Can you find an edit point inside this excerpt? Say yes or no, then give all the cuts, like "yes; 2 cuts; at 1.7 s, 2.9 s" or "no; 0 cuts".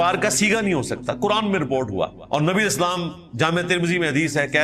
yes; 1 cut; at 2.2 s